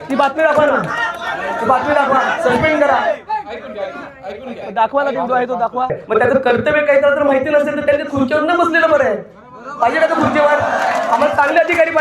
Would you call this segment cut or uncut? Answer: cut